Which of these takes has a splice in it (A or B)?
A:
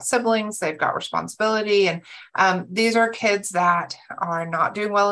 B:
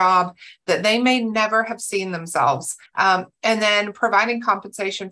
B